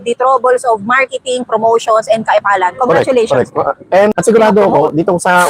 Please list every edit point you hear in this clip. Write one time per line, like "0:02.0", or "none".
0:04.1